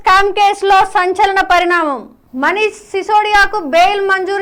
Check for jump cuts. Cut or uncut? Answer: uncut